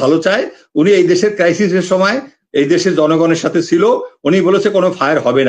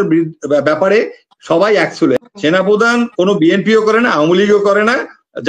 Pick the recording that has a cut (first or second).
second